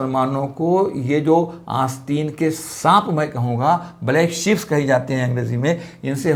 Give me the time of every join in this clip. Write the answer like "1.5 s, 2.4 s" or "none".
none